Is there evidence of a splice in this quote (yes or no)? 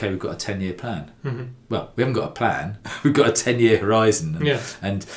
no